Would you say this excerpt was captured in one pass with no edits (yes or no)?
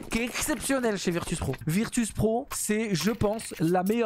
no